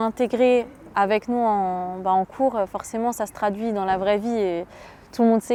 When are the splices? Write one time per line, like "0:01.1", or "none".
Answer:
none